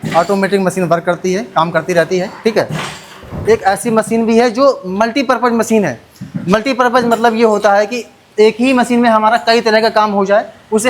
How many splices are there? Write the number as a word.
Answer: one